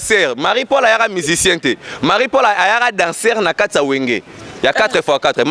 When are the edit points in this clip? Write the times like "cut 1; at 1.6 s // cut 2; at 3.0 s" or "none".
none